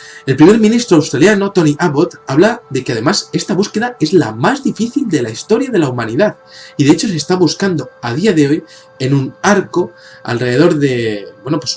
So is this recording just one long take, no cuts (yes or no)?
no